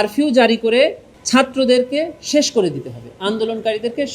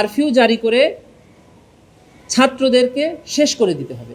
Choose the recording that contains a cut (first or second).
first